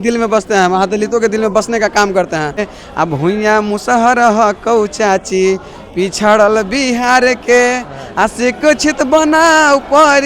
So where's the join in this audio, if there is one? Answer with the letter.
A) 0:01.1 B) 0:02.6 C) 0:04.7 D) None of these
B